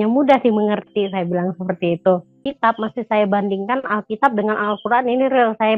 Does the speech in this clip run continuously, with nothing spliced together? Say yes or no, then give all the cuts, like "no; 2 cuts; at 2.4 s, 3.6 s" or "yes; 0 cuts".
no; 1 cut; at 2.5 s